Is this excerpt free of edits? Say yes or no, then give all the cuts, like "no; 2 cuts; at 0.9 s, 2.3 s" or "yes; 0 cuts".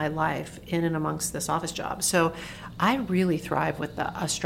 yes; 0 cuts